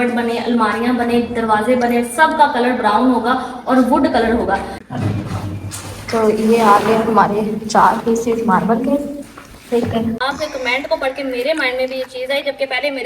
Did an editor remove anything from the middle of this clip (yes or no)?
yes